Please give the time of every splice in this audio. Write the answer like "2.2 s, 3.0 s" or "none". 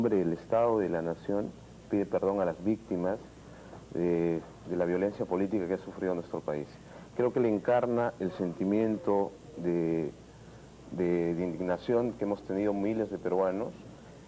10.0 s